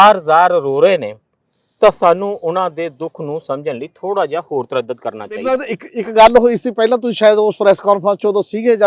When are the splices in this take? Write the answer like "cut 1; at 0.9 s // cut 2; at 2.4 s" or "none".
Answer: cut 1; at 5.7 s